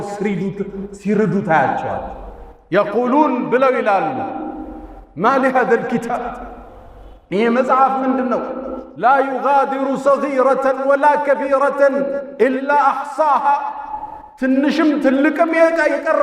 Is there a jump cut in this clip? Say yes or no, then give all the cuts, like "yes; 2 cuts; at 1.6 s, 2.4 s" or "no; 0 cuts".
no; 0 cuts